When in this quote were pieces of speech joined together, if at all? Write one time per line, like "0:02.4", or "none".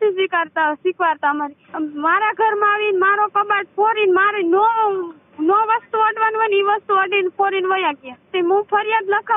0:01.6
0:08.3